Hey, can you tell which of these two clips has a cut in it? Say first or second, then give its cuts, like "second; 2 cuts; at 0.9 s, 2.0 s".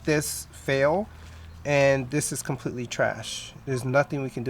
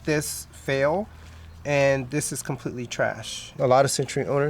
second; 1 cut; at 3.4 s